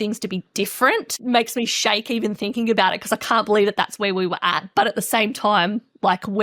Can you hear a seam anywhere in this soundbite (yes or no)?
yes